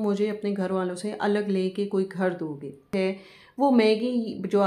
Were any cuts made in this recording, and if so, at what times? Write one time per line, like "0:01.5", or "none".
0:02.9